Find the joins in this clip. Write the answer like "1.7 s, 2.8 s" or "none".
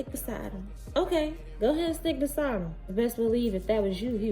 1.0 s, 2.9 s